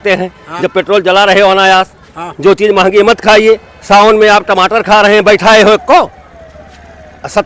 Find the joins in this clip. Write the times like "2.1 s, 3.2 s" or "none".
none